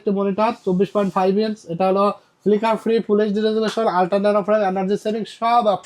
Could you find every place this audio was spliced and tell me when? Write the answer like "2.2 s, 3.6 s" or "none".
none